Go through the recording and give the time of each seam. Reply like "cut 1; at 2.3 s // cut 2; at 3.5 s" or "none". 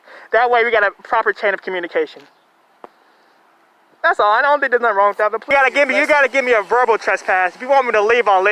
cut 1; at 5.4 s